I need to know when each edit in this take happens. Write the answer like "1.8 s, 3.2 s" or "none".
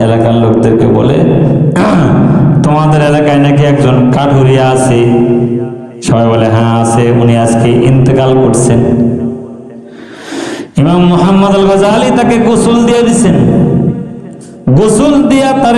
none